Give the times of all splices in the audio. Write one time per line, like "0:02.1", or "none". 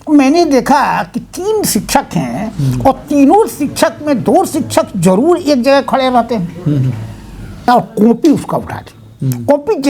0:07.7